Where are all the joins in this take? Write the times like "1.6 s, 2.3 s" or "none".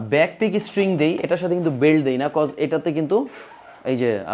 none